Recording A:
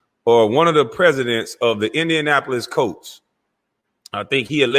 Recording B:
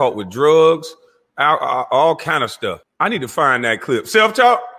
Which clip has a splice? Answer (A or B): B